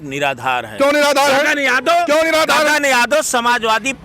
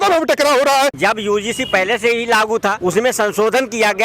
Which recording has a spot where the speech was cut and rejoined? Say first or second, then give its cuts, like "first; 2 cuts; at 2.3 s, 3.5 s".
second; 2 cuts; at 1.0 s, 2.8 s